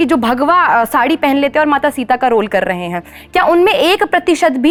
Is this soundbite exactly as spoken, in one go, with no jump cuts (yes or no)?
yes